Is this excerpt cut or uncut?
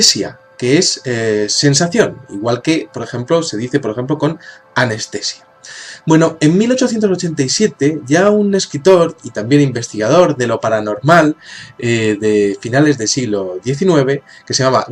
cut